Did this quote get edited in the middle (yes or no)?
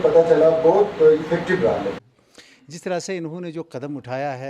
yes